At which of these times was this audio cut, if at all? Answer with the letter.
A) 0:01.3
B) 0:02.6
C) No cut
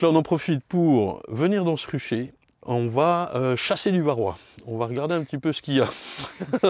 B